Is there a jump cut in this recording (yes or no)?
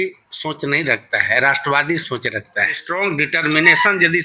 yes